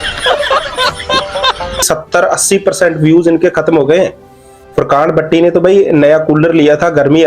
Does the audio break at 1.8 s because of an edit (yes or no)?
yes